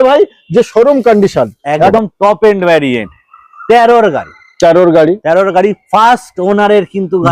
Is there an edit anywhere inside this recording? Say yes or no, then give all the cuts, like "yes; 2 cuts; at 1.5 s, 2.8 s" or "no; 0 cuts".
yes; 1 cut; at 1.9 s